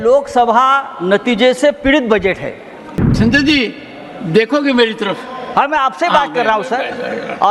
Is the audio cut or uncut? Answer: cut